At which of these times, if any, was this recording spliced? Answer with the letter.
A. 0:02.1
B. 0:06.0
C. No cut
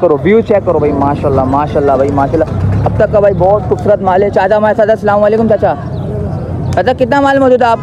C